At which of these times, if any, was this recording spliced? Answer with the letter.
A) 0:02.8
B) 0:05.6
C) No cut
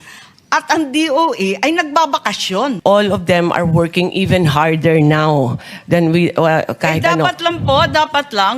A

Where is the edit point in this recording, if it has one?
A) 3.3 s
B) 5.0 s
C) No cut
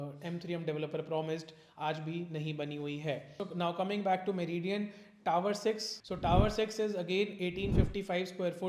C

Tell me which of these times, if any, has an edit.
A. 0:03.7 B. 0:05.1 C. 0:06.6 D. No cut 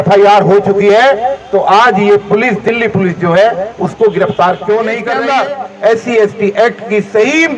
B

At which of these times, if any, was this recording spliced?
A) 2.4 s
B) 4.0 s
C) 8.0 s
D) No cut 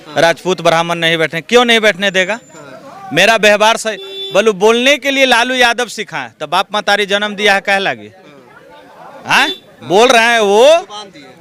D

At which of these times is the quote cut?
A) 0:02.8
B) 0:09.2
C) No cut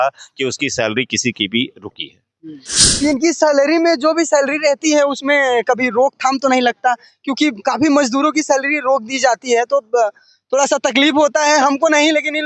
A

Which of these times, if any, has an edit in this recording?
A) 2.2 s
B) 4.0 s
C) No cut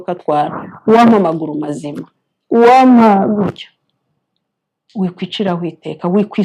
C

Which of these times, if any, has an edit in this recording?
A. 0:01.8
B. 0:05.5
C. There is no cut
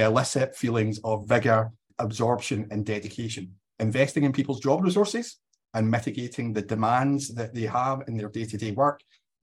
A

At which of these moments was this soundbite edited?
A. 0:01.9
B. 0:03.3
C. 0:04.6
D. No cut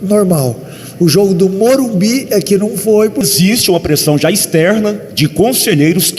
B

